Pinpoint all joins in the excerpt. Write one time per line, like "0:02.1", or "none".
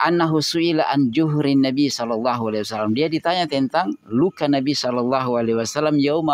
none